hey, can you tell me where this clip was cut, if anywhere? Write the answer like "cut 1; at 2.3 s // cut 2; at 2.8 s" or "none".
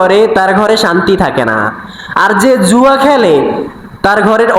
none